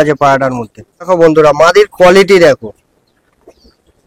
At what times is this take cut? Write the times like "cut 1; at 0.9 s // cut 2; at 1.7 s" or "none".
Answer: cut 1; at 1.1 s